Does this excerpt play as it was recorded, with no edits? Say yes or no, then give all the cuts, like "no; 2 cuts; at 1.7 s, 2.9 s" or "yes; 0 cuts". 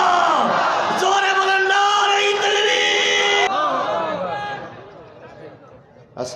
no; 1 cut; at 3.5 s